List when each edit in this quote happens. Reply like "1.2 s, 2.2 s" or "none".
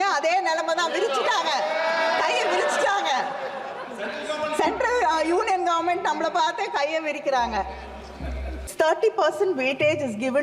8.7 s